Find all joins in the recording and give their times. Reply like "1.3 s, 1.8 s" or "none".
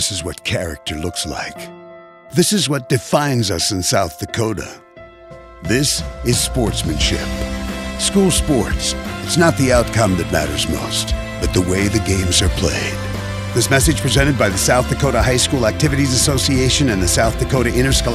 none